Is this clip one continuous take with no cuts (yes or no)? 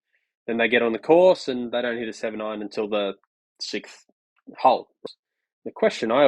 no